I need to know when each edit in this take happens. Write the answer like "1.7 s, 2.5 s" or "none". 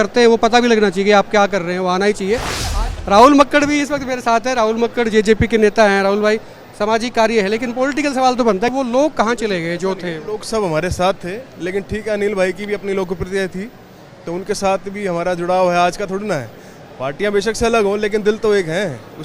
2.7 s, 8.7 s